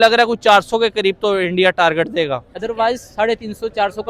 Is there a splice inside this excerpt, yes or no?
no